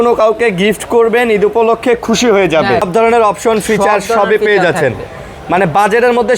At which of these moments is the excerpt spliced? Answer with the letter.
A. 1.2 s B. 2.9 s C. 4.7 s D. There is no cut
B